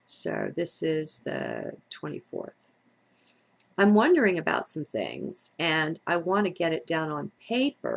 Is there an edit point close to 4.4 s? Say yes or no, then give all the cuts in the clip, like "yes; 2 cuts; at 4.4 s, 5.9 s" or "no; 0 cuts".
no; 1 cut; at 6.8 s